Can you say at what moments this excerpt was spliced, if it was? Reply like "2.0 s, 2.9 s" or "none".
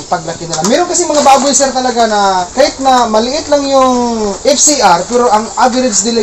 2.5 s, 4.3 s